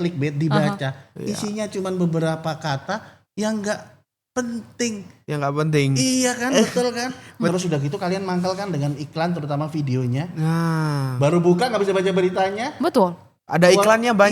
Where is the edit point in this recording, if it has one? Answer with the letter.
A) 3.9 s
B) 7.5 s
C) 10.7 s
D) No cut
B